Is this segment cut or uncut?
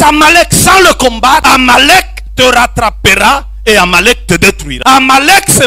cut